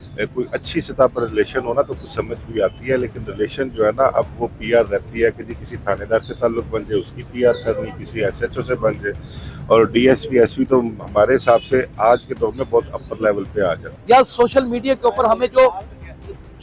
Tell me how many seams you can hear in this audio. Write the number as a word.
one